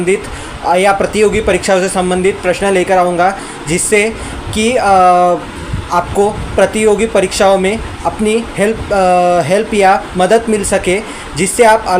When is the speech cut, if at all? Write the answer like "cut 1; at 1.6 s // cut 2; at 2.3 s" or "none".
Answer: cut 1; at 2.5 s